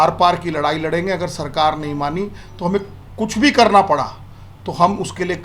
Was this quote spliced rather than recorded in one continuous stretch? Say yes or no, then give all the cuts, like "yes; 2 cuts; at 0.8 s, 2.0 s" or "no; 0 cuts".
no; 0 cuts